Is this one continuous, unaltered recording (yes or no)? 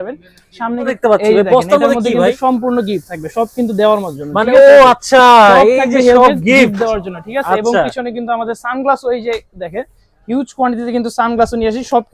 no